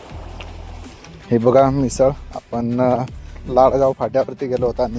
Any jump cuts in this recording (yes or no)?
no